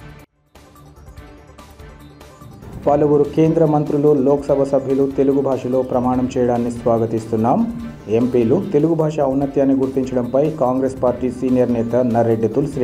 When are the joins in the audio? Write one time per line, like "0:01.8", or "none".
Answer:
0:01.1